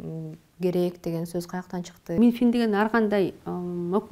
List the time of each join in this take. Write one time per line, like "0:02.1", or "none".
0:02.2